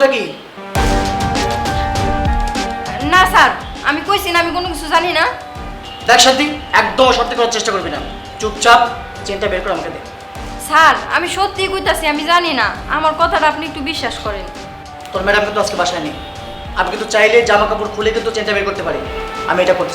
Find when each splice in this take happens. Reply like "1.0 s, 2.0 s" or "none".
15.0 s